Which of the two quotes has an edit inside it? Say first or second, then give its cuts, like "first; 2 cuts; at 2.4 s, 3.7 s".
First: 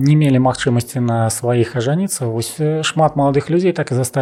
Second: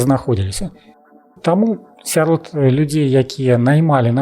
second; 1 cut; at 1.1 s